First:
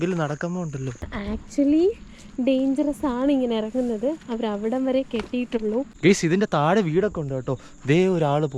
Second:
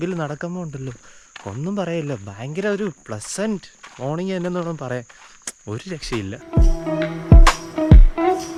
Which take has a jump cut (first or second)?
first